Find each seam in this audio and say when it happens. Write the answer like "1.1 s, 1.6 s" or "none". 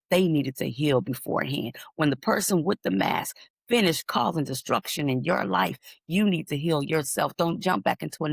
none

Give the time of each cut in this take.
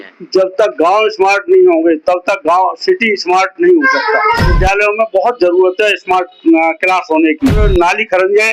4.5 s, 7.6 s

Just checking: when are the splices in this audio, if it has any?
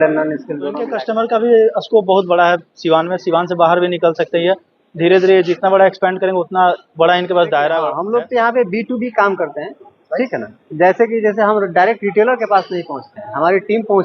0.9 s, 8.0 s

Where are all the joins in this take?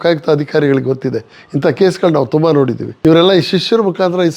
2.8 s

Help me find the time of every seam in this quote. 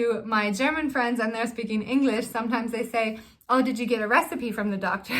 2.3 s

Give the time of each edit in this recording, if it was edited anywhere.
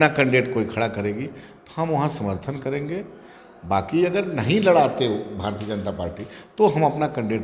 none

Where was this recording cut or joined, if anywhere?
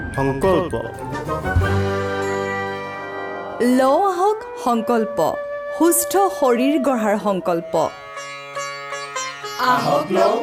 none

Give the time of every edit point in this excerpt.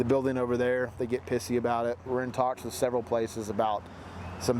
2.1 s

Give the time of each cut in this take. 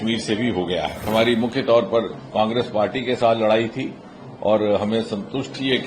1.1 s

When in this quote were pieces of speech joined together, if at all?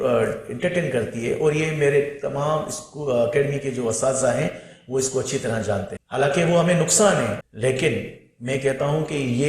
6.0 s, 7.4 s

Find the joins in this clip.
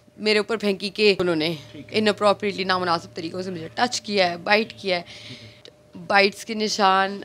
1.2 s, 5.7 s

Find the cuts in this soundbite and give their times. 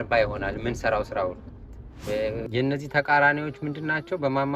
2.4 s

